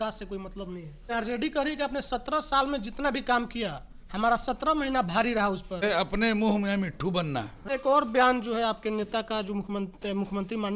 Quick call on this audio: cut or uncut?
cut